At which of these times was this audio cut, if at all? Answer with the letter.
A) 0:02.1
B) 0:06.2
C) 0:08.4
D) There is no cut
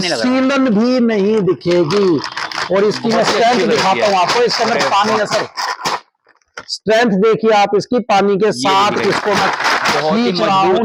D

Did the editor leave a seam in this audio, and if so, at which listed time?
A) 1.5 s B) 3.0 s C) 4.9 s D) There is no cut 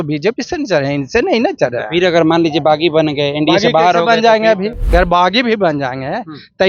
C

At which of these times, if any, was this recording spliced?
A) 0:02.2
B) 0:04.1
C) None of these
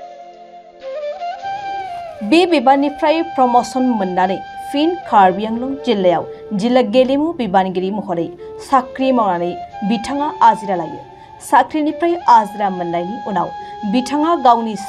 A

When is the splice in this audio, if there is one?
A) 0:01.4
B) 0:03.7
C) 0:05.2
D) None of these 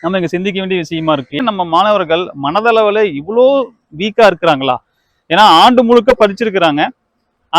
A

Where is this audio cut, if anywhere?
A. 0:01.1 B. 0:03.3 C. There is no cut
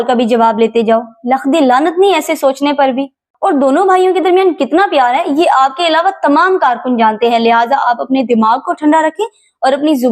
B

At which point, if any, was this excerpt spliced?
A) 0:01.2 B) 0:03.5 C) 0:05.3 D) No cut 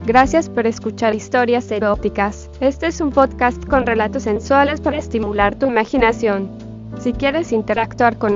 A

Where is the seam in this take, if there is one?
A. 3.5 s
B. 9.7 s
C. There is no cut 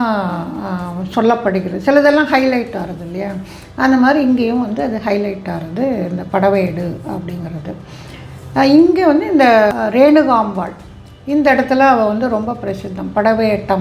B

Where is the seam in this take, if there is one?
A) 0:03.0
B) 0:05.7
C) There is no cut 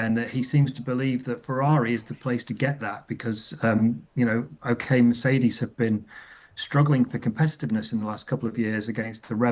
C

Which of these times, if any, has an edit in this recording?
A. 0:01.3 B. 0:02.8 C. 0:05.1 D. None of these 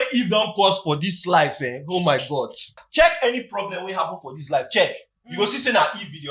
B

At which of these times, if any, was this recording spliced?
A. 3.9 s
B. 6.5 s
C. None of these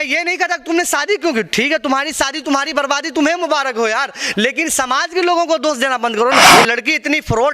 B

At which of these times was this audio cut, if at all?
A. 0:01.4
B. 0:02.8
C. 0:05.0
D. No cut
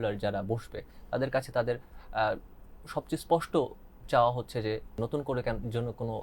C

